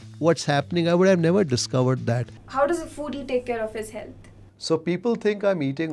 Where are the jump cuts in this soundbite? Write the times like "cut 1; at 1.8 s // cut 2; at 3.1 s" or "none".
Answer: cut 1; at 2.3 s